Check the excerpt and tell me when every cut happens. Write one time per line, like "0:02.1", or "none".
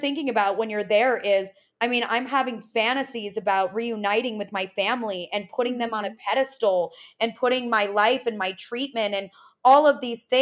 none